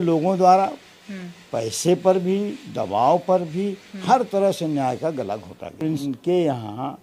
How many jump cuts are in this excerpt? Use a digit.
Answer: 1